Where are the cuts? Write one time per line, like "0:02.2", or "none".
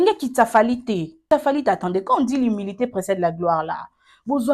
0:01.3

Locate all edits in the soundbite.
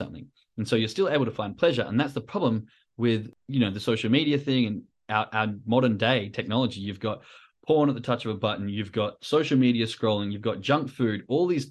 0:03.4

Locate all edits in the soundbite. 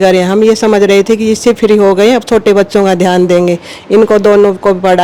none

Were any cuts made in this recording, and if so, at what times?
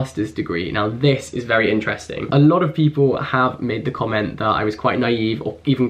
none

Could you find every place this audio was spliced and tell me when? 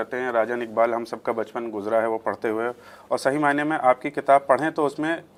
none

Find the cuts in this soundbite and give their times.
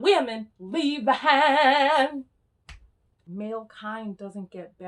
0:03.1

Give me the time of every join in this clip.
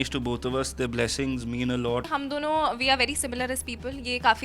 0:02.0

